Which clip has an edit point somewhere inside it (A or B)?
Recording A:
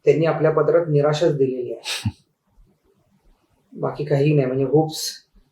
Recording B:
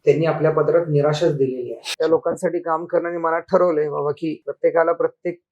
B